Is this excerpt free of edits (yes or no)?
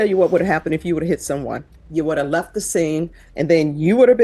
no